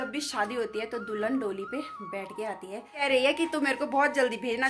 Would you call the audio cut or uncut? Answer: cut